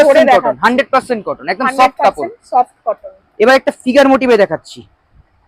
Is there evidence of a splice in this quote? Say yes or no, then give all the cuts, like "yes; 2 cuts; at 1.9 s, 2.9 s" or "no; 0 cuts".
no; 0 cuts